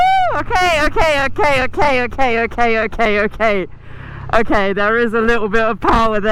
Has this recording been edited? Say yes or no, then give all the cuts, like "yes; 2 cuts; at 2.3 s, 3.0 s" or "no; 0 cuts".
no; 0 cuts